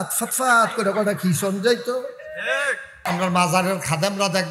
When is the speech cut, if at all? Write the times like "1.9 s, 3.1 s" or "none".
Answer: 3.1 s